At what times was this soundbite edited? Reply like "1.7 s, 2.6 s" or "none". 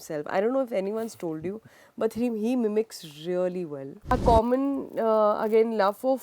4.1 s